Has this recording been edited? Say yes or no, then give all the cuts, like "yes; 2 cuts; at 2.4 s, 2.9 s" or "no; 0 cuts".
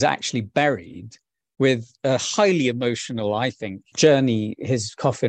yes; 2 cuts; at 1.4 s, 3.8 s